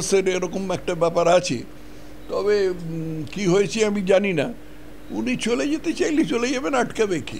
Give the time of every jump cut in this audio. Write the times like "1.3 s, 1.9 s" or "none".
none

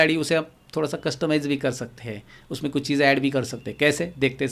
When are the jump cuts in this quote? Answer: none

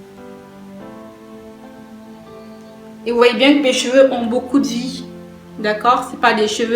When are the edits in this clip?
3.0 s

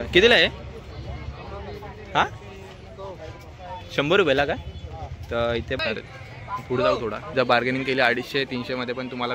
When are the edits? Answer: 5.8 s, 7.3 s

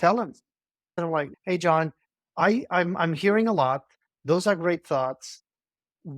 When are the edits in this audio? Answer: 1.1 s

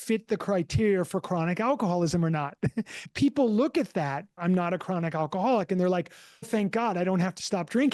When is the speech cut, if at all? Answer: 3.0 s, 4.4 s, 6.5 s

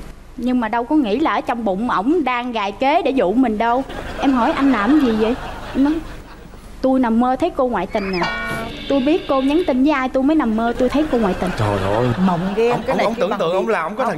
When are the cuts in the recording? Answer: 4.0 s

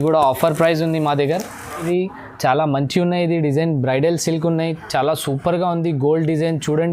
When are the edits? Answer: 1.7 s

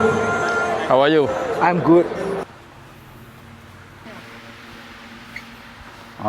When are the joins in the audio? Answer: 2.4 s

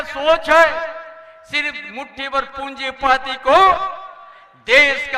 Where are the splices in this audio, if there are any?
none

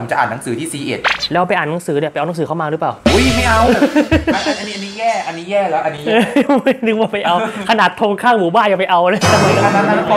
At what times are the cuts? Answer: 1.2 s

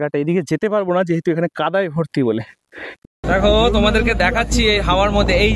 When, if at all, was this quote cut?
3.0 s

